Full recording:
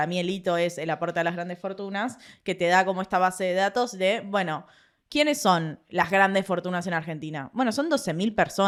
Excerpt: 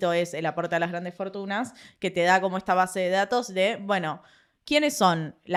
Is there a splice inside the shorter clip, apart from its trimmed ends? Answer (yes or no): no